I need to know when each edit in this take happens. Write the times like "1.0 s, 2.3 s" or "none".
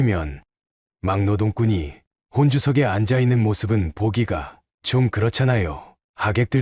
none